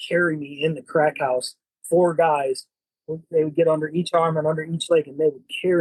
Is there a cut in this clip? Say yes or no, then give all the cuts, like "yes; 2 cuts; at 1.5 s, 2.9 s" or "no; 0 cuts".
no; 0 cuts